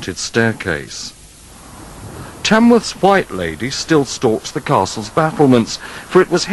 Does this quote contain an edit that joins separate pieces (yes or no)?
no